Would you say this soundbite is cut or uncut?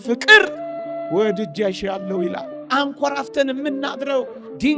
cut